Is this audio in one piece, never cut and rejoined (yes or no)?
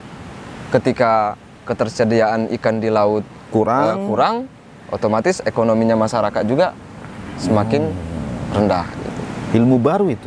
yes